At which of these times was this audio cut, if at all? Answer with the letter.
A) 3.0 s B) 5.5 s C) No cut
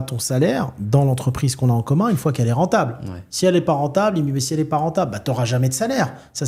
C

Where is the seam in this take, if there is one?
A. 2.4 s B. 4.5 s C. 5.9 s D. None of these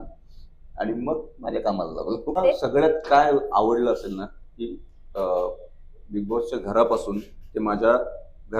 A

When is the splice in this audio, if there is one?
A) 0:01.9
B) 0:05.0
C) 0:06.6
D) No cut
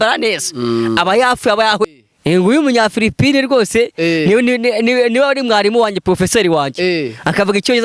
A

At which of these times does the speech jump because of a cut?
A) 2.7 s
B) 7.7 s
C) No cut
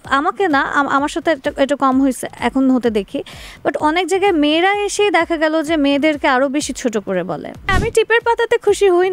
B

